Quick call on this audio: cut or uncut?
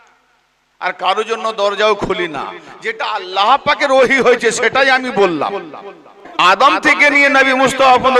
cut